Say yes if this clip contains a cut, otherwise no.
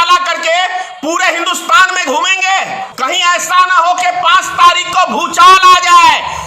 yes